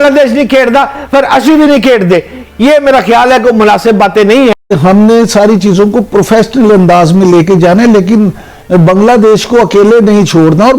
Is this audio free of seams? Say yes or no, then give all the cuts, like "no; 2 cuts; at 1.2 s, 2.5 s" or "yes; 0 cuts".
no; 1 cut; at 4.5 s